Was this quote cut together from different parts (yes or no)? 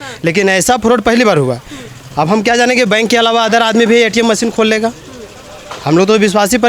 no